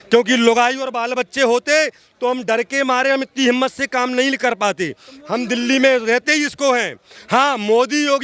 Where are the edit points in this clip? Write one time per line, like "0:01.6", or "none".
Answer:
none